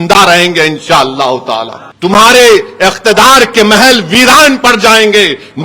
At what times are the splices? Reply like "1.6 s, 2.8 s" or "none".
1.8 s